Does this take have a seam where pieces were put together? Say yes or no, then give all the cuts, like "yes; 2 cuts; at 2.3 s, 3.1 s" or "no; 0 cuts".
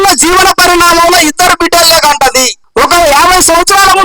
yes; 1 cut; at 2.6 s